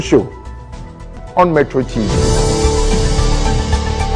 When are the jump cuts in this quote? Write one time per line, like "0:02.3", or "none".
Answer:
none